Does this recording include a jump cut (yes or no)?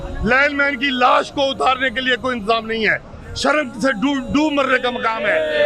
no